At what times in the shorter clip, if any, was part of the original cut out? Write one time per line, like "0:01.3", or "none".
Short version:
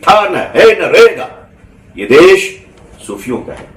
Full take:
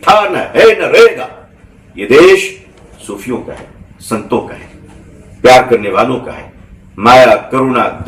none